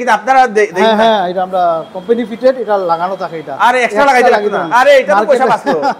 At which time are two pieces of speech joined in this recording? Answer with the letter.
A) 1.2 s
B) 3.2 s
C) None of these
C